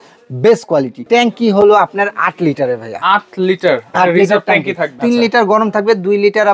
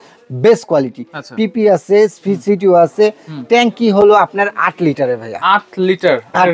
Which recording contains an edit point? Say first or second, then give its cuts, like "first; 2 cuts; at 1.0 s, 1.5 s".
first; 2 cuts; at 1.0 s, 4.9 s